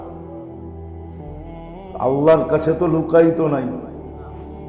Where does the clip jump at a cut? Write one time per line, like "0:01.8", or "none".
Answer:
none